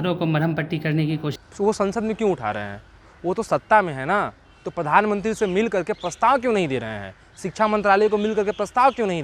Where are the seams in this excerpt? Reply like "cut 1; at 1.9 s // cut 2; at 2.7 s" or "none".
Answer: cut 1; at 1.3 s